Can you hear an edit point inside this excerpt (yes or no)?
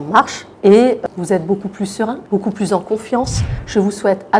yes